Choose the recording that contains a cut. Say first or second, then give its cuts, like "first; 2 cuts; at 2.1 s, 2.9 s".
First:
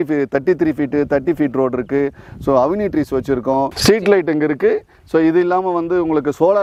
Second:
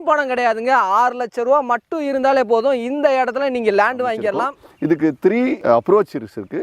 second; 2 cuts; at 4.5 s, 5.6 s